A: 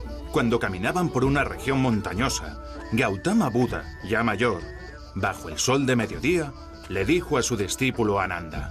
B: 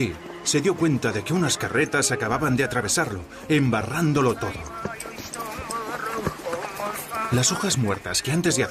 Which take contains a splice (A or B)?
B